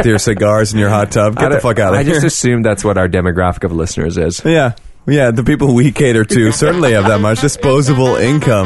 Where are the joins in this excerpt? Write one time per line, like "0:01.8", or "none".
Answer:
0:07.4